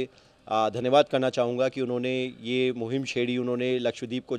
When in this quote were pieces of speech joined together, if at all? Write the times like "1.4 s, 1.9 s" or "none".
none